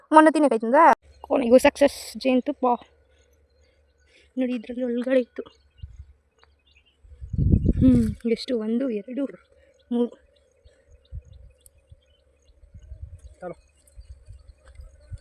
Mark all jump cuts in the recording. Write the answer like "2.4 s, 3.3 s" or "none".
0.9 s